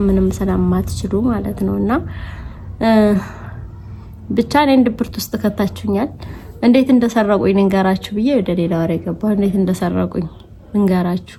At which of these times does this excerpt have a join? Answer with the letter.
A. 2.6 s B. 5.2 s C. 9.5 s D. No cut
D